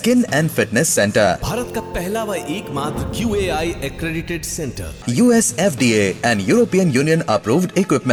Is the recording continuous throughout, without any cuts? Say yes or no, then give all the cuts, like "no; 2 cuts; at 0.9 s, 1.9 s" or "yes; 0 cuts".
yes; 0 cuts